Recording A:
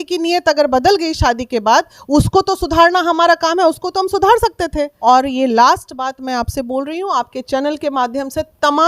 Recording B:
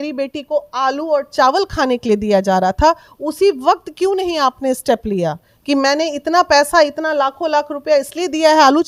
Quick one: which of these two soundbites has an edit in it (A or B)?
A